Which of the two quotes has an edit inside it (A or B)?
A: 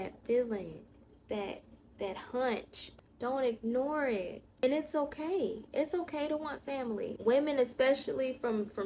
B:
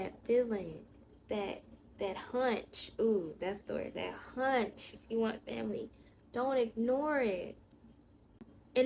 A